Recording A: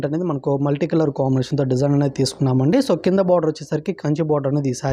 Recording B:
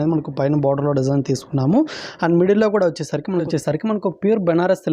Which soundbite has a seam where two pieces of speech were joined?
B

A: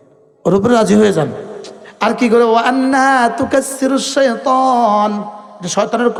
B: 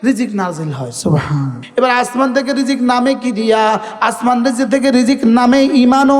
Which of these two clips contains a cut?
B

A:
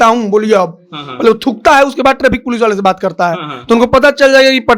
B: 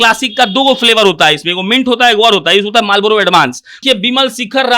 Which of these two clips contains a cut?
B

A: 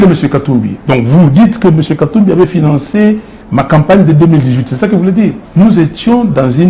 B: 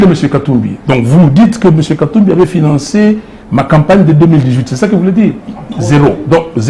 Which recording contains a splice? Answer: A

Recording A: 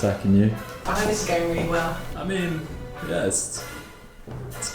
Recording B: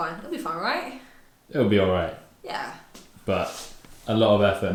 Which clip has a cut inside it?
A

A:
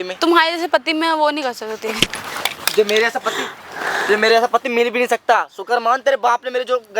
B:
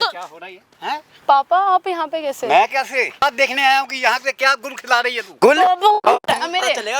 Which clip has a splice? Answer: B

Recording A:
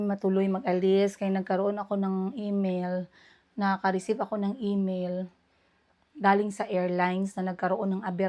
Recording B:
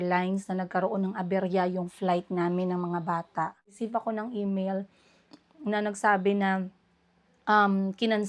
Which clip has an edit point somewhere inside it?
B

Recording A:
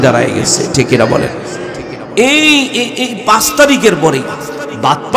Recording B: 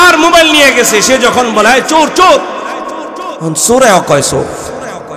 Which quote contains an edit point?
A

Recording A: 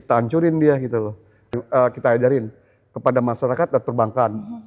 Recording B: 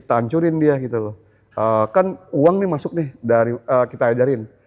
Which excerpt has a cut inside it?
A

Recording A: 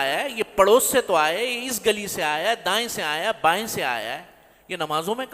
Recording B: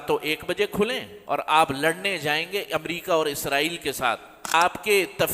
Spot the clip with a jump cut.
B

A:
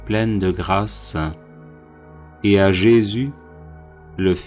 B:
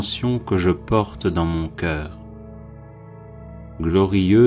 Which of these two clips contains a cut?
B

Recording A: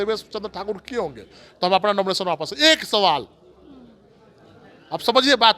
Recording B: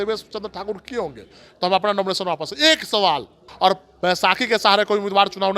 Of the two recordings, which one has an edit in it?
B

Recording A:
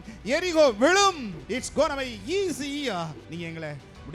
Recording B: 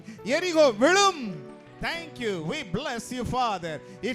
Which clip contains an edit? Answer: A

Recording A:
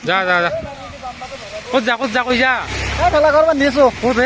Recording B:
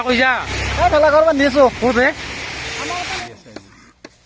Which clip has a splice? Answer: B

